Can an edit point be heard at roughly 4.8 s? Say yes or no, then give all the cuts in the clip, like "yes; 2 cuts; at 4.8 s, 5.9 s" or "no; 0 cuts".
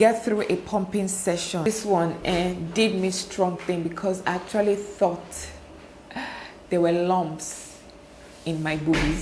no; 1 cut; at 1.6 s